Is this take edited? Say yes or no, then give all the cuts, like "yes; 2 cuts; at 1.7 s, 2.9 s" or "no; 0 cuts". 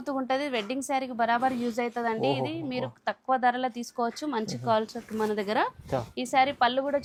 no; 0 cuts